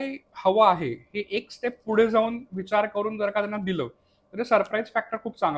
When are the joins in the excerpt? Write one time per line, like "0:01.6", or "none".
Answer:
none